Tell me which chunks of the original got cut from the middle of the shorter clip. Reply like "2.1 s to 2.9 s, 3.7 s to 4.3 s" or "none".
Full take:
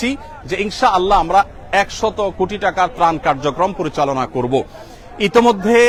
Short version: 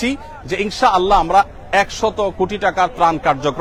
none